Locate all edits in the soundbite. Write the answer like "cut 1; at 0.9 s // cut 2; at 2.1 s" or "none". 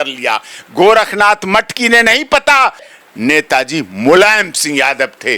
cut 1; at 3.0 s